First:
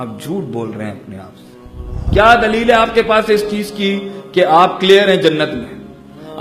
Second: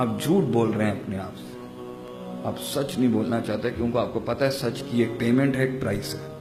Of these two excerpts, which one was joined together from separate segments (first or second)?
first